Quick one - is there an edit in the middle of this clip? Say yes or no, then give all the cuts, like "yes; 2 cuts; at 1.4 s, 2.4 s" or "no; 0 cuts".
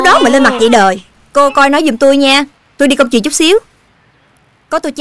yes; 1 cut; at 1.1 s